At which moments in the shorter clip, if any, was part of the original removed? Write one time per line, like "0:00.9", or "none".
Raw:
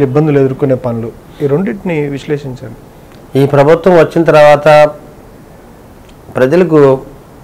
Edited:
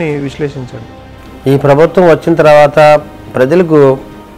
0:03.2